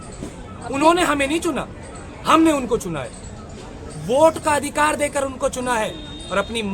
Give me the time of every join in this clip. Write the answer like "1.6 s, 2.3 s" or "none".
none